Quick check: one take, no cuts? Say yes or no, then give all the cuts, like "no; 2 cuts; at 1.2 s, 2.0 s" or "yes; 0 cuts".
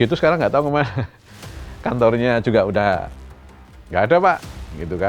yes; 0 cuts